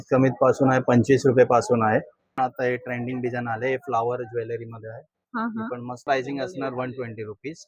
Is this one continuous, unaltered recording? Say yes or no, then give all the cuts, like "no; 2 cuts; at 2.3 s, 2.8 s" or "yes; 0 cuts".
no; 2 cuts; at 2.3 s, 6.0 s